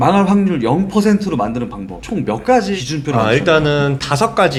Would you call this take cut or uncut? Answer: uncut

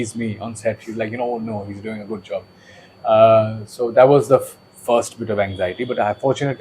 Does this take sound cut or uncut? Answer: uncut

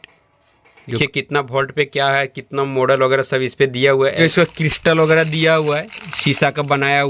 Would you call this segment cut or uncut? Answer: cut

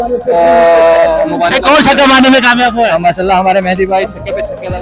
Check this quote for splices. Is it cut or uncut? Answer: uncut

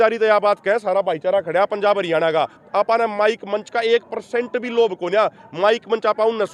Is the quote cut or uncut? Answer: uncut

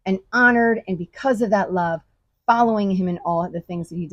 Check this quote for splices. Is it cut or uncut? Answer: uncut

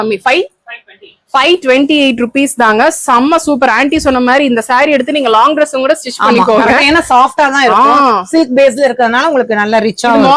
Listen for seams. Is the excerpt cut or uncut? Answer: uncut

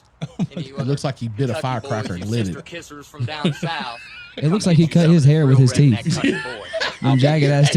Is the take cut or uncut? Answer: uncut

